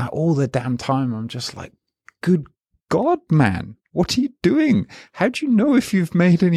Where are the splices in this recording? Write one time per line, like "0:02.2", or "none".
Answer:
none